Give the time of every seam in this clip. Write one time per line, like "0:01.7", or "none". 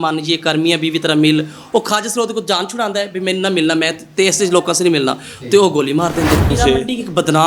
0:06.5